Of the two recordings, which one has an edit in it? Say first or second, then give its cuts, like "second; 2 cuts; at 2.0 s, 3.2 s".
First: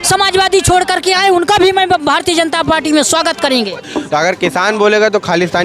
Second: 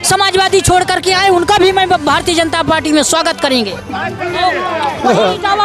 first; 1 cut; at 3.8 s